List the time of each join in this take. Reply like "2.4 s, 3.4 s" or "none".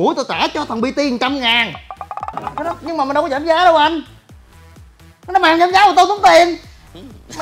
2.5 s